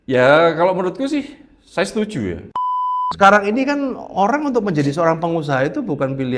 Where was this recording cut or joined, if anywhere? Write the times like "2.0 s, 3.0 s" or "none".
2.4 s